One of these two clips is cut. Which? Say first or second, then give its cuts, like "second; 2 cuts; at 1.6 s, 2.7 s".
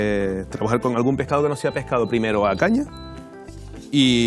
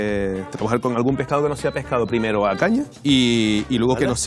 second; 1 cut; at 2.9 s